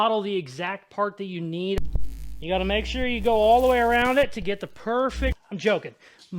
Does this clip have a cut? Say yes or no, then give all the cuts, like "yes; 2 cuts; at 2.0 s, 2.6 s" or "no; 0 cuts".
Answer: yes; 2 cuts; at 1.8 s, 5.4 s